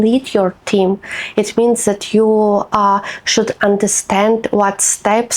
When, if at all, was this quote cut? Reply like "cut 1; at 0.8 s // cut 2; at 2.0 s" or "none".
none